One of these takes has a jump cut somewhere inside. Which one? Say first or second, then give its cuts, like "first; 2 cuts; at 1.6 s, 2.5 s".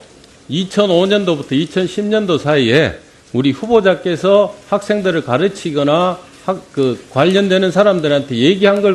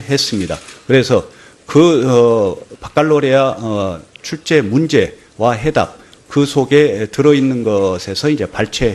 first; 1 cut; at 5.5 s